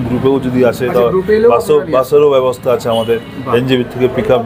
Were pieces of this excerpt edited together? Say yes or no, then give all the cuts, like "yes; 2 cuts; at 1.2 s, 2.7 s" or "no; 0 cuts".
no; 0 cuts